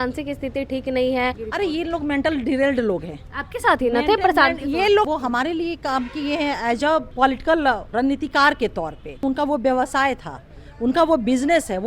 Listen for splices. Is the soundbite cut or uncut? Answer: cut